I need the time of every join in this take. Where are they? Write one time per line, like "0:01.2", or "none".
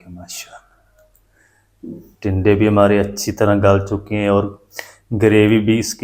none